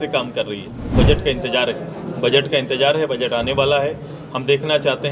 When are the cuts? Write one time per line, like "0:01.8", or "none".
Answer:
0:01.0